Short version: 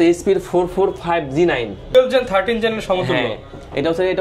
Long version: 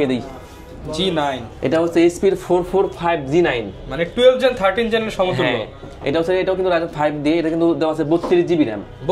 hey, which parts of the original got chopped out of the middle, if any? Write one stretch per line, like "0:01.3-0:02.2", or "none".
0:03.9-0:04.2